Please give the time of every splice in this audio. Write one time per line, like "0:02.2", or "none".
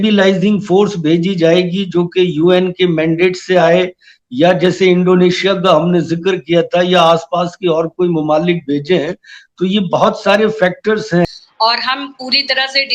0:11.3